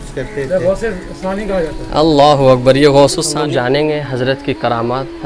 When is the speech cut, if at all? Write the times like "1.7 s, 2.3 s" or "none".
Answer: 3.3 s